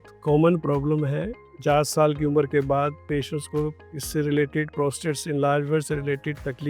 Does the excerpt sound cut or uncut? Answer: cut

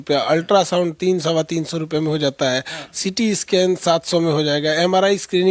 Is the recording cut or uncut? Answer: uncut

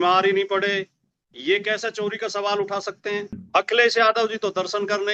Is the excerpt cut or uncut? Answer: cut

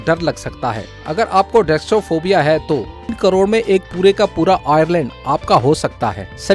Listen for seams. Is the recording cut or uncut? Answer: cut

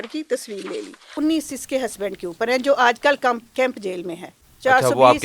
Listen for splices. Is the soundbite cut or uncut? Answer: cut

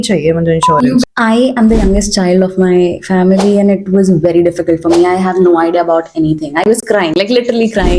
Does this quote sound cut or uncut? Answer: cut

